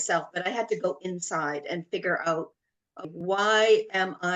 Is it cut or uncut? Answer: cut